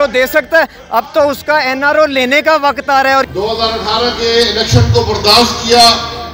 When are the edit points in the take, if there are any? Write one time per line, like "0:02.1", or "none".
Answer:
0:03.3